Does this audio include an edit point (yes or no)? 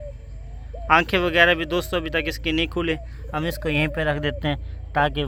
no